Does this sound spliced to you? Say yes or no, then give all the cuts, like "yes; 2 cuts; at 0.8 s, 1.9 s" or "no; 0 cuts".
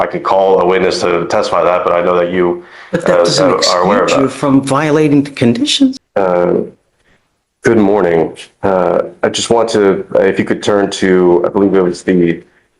yes; 1 cut; at 6.0 s